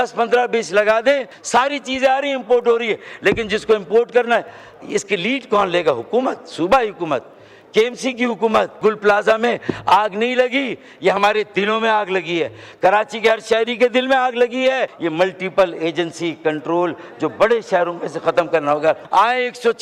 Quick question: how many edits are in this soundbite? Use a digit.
4